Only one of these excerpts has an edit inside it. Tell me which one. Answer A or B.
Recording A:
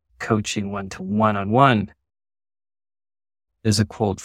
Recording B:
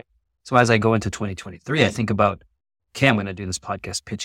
A